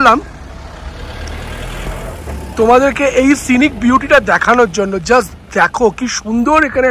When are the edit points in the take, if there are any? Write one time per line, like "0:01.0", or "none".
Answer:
none